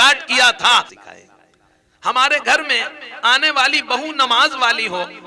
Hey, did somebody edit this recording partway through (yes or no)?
yes